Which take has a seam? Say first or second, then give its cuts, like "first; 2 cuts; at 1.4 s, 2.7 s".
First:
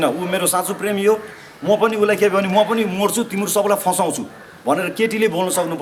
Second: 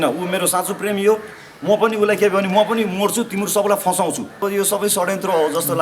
second; 1 cut; at 4.4 s